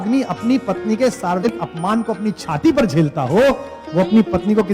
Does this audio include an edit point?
yes; 1 cut; at 1.5 s

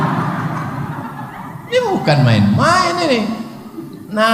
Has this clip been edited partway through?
no; 0 cuts

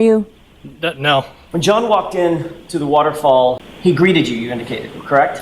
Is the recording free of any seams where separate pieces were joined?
no; 2 cuts; at 1.4 s, 3.7 s

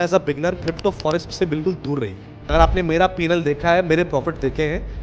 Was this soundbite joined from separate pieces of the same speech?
yes; 1 cut; at 2.5 s

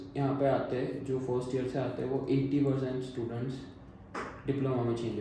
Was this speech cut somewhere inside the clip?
no; 0 cuts

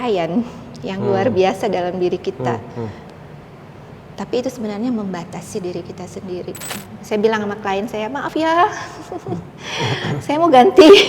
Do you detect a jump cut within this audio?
yes; 1 cut; at 6.9 s

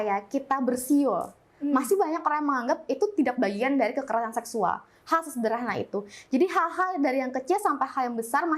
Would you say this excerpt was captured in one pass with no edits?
yes; 0 cuts

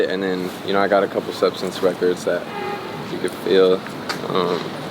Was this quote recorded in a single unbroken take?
yes; 0 cuts

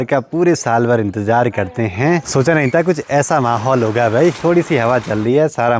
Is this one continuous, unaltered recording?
no; 2 cuts; at 2.3 s, 4.4 s

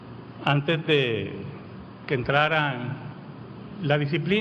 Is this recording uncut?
yes; 0 cuts

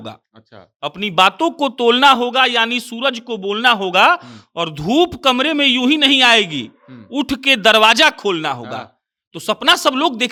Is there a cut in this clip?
no; 0 cuts

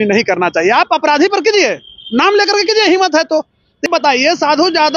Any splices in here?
yes; 1 cut; at 3.9 s

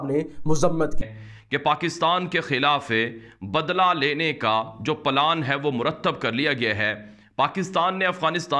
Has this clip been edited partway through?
yes; 1 cut; at 0.9 s

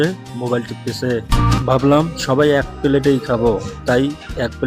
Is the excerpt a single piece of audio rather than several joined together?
no; 1 cut; at 1.6 s

